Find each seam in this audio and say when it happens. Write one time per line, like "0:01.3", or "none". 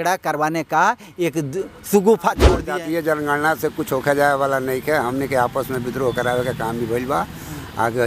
0:02.6